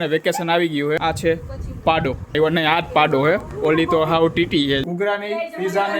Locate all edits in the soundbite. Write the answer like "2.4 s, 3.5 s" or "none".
1.0 s, 2.4 s, 4.8 s